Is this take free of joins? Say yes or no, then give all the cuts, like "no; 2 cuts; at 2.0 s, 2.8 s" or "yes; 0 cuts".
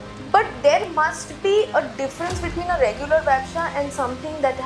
yes; 0 cuts